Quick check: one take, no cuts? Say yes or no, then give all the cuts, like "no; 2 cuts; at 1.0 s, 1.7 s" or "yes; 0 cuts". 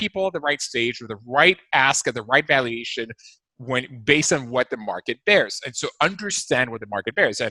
yes; 0 cuts